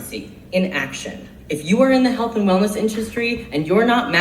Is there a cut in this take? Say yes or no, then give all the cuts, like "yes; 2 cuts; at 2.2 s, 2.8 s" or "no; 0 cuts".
yes; 1 cut; at 1.3 s